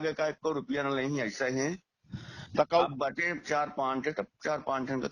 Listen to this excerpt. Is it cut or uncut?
uncut